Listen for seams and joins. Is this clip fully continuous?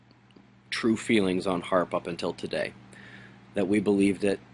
yes; 0 cuts

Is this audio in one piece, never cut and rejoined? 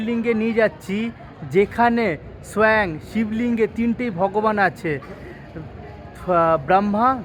yes; 0 cuts

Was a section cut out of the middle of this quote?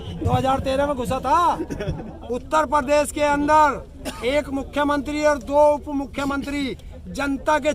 yes; 1 cut; at 2.1 s

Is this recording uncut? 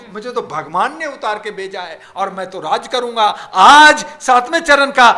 yes; 0 cuts

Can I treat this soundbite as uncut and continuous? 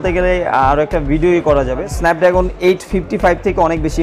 no; 1 cut; at 1.9 s

